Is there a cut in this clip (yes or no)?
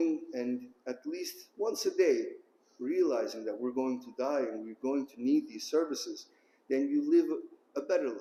no